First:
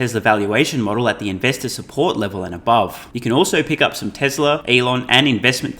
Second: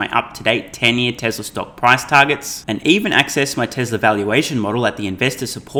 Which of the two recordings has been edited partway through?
first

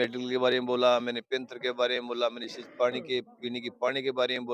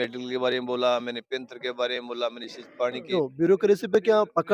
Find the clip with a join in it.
second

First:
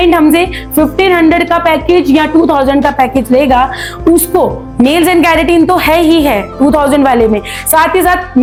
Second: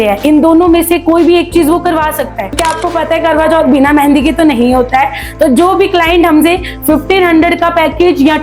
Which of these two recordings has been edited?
second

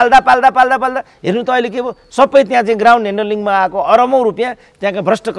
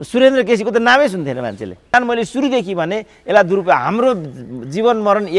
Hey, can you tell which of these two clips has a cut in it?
second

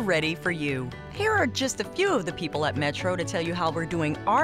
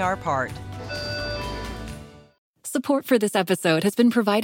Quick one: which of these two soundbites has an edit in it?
second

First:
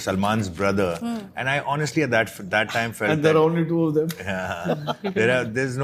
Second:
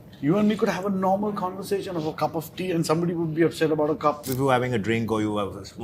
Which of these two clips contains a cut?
second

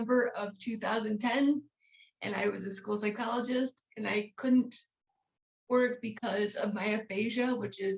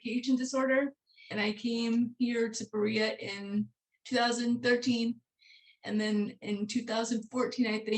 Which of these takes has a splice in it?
second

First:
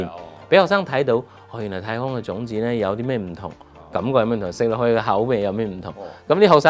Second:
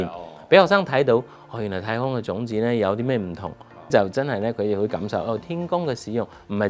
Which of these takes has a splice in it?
second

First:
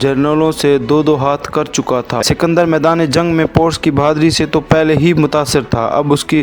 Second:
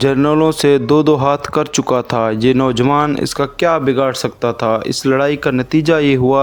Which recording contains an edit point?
first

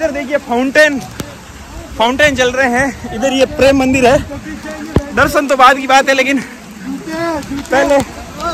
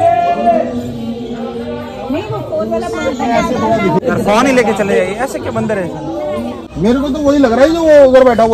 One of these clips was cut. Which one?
second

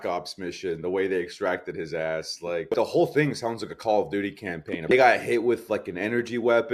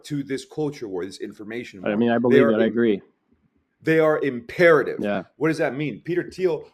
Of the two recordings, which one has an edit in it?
first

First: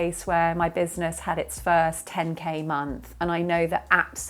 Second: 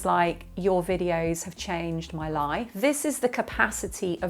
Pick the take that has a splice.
second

